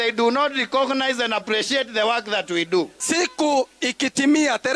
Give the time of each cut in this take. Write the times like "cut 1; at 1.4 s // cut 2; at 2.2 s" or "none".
cut 1; at 3.0 s